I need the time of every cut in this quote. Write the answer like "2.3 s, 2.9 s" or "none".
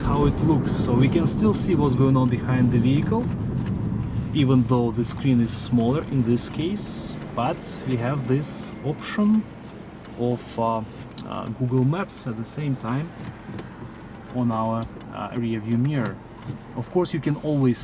16.7 s

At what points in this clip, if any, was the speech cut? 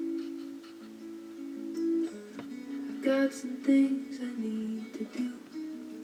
none

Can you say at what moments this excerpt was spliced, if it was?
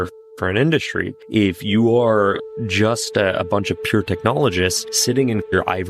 none

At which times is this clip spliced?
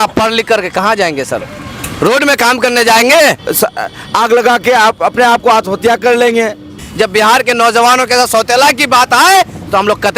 3.4 s, 6.9 s

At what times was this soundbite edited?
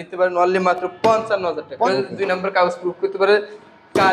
1.7 s

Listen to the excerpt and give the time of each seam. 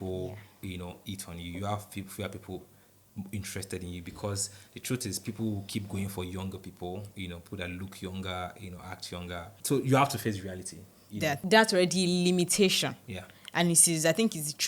9.6 s, 11.4 s

